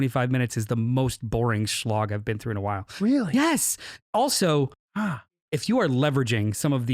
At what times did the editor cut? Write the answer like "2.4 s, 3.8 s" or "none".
5.4 s